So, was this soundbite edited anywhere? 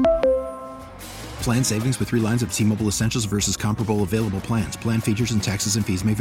no; 0 cuts

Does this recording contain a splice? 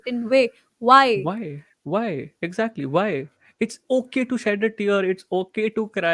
no; 0 cuts

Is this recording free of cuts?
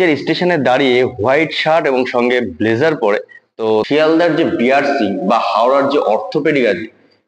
no; 1 cut; at 3.8 s

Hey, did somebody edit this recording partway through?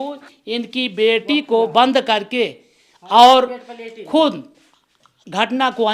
no; 0 cuts

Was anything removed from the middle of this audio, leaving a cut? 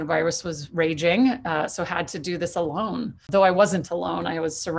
yes; 1 cut; at 3.3 s

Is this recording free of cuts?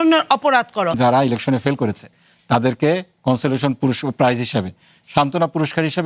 no; 1 cut; at 1.0 s

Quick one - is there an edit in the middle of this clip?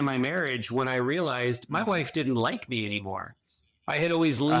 no; 0 cuts

